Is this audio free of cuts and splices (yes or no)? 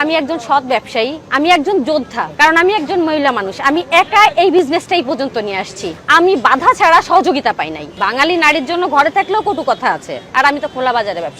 no